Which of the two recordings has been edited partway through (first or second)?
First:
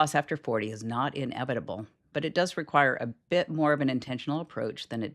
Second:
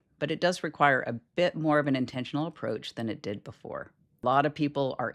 second